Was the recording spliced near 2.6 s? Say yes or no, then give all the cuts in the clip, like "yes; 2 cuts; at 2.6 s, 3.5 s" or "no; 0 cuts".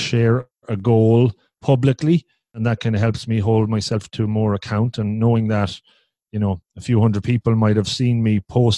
yes; 1 cut; at 2.6 s